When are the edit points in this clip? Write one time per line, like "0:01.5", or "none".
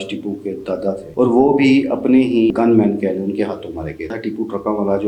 0:01.0
0:02.5
0:04.2